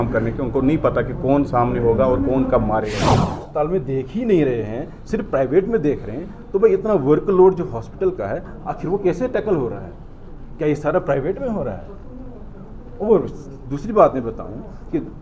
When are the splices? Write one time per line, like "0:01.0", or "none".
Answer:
0:03.4

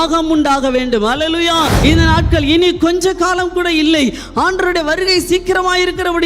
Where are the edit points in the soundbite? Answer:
0:01.7

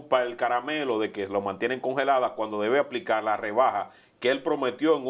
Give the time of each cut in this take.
none

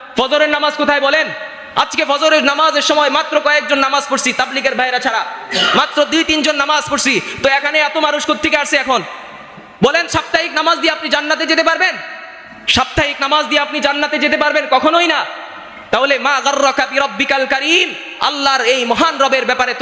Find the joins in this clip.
none

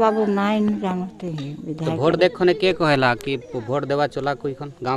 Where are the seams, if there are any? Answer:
none

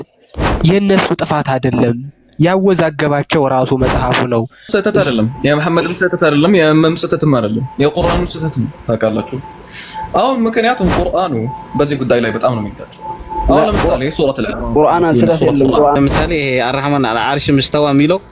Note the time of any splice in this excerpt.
0:04.7
0:16.0

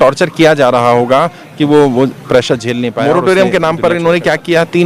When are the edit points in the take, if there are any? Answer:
0:03.0

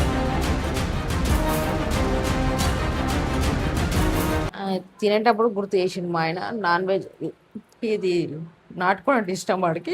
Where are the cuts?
0:04.5

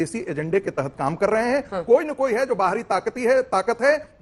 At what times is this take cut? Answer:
none

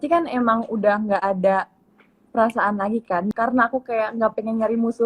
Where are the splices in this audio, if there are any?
0:03.3

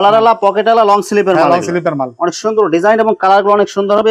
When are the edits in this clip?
none

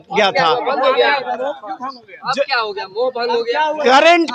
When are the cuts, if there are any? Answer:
none

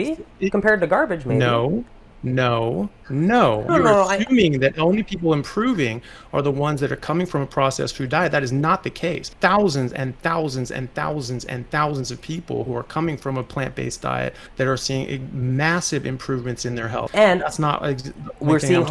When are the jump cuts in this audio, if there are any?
0:03.7
0:09.3
0:14.4
0:17.0

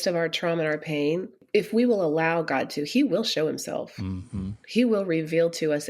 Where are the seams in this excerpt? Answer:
0:01.4

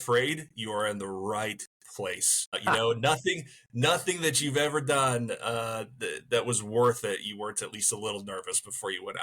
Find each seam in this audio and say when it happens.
0:02.6

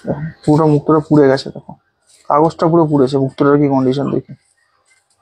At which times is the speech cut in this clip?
none

